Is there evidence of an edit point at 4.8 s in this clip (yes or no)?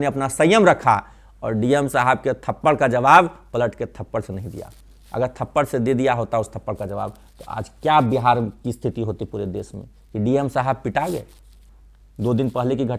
no